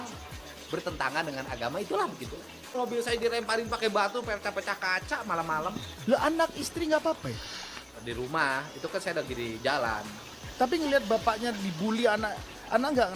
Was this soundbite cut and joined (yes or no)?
yes